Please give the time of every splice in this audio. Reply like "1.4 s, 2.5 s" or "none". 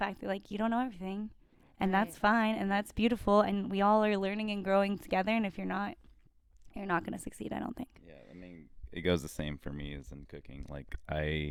none